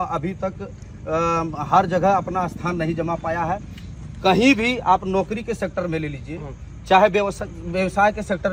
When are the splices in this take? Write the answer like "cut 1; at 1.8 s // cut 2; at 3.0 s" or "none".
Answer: none